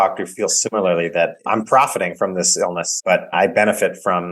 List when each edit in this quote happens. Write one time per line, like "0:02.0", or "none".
0:01.4
0:03.1